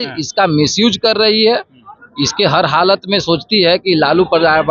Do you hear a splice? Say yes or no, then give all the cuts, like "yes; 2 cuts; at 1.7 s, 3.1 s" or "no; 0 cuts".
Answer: no; 0 cuts